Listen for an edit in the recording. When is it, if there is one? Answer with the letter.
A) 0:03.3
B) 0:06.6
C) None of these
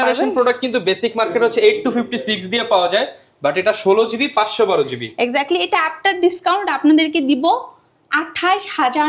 C